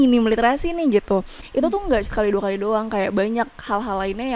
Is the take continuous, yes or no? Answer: yes